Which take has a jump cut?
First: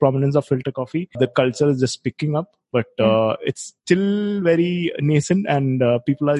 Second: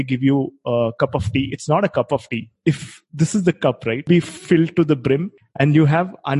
second; 3 cuts; at 2.4 s, 4.1 s, 5.4 s

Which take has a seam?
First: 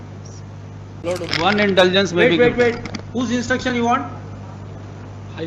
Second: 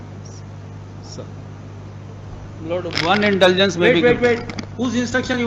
first; 1 cut; at 1.0 s

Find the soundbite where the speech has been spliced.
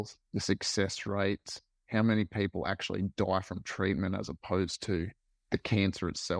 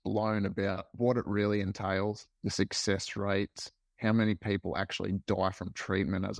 second; 1 cut; at 0.9 s

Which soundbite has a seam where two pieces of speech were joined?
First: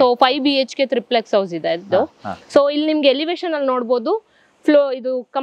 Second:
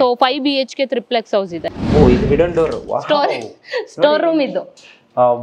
second; 1 cut; at 1.6 s

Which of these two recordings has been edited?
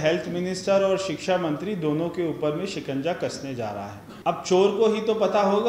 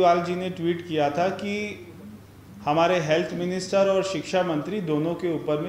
first; 1 cut; at 4.0 s

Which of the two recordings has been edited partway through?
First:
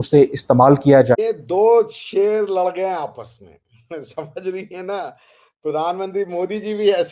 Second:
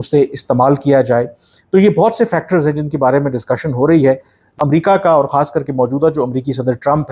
first; 1 cut; at 1.2 s

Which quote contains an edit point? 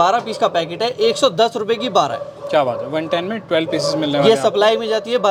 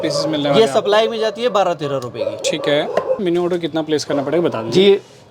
second; 1 cut; at 3.2 s

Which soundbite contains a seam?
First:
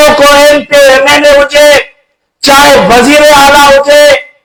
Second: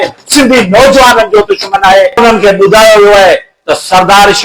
second; 1 cut; at 2.2 s

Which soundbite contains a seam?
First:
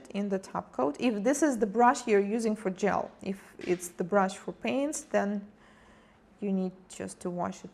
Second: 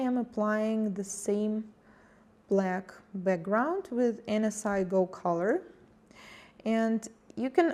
first; 1 cut; at 2.6 s

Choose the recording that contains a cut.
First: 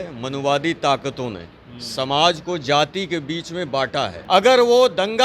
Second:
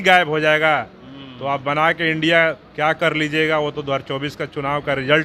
first; 1 cut; at 4.2 s

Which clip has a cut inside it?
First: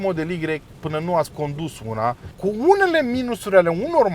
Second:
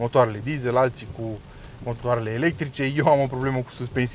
first; 1 cut; at 2.3 s

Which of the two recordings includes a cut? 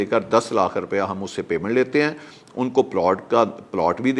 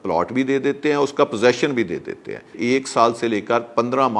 second; 1 cut; at 2.6 s

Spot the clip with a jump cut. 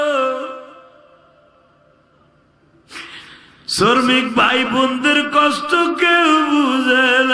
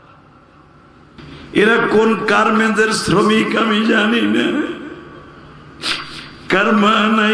second; 1 cut; at 1.2 s

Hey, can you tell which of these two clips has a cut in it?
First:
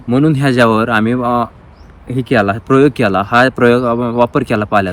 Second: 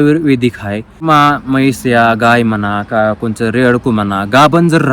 second; 1 cut; at 1.0 s

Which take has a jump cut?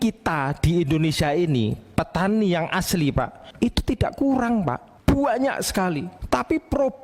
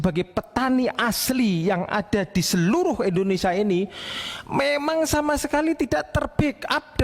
first; 3 cuts; at 3.4 s, 4.9 s, 6.1 s

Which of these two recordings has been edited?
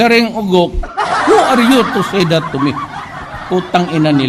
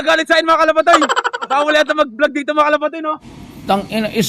second; 2 cuts; at 1.5 s, 3.4 s

